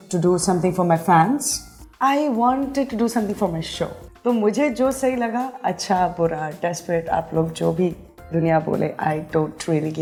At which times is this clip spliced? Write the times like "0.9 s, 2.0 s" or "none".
none